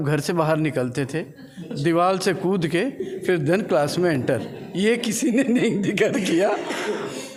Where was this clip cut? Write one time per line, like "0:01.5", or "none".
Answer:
none